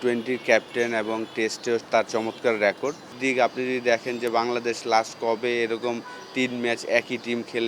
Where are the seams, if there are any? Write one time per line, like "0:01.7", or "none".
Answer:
0:03.1